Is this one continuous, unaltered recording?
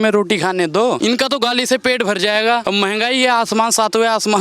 no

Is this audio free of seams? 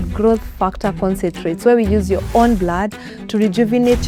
yes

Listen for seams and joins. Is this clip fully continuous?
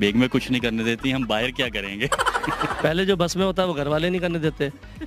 no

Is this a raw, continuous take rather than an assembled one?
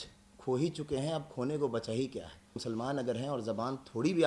no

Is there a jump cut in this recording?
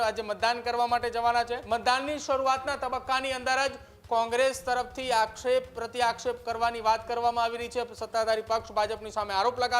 yes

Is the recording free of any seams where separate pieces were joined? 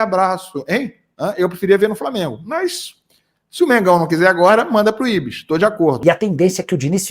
no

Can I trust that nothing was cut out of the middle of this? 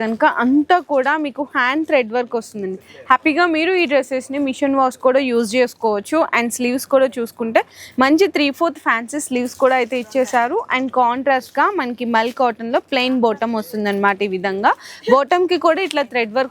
yes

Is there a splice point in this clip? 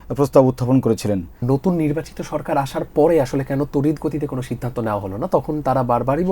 yes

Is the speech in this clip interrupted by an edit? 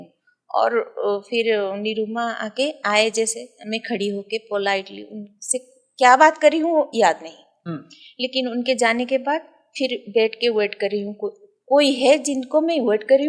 no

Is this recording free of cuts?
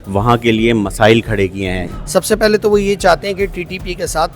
no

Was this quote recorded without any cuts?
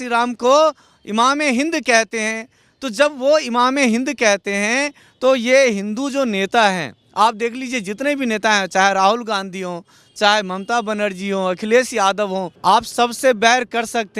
no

